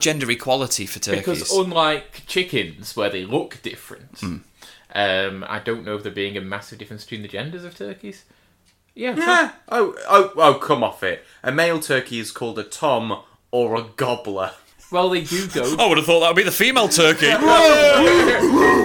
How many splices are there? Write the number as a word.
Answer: one